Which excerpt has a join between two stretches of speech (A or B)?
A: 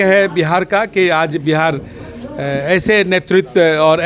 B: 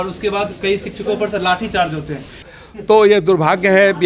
B